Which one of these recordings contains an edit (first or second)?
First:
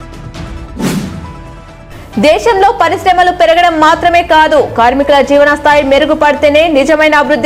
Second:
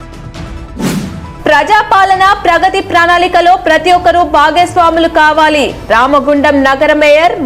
second